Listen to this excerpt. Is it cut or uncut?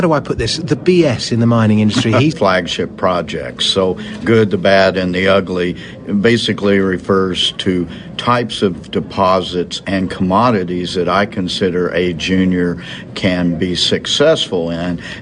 uncut